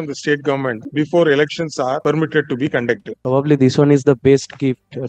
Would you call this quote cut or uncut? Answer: cut